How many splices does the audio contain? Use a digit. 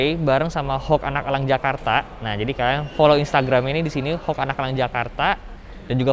0